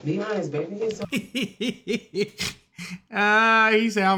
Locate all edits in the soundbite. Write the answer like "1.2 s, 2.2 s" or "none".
none